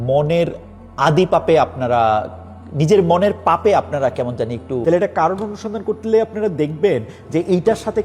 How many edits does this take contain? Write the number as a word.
one